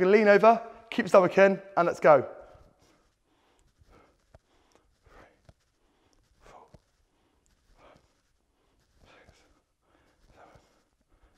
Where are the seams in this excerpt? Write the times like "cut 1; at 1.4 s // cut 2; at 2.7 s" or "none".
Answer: none

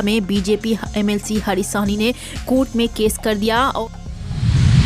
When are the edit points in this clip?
cut 1; at 3.8 s

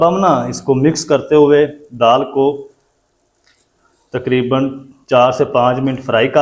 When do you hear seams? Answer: none

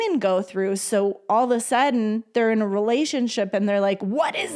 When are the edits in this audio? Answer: none

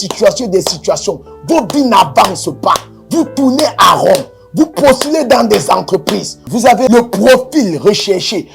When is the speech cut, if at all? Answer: none

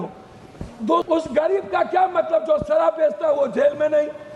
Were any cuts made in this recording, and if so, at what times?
cut 1; at 1.0 s

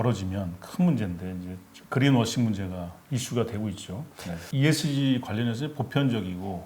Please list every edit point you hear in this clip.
cut 1; at 4.4 s

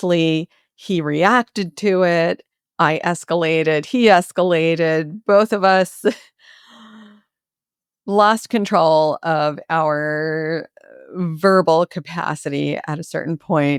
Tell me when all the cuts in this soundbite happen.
none

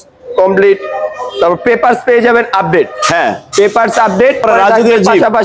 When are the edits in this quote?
cut 1; at 4.4 s

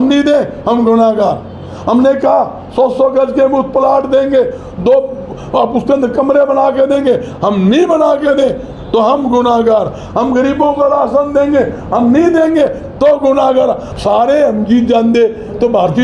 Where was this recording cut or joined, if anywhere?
cut 1; at 13.9 s

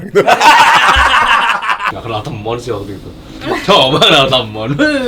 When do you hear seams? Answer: cut 1; at 1.9 s

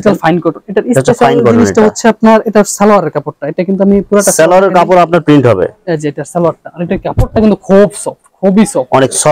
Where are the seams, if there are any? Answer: none

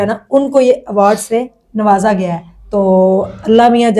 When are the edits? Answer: none

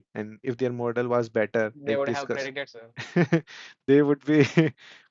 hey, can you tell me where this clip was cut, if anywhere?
none

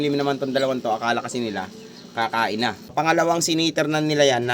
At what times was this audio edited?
cut 1; at 3.0 s

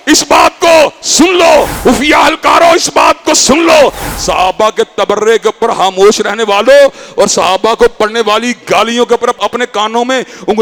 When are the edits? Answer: none

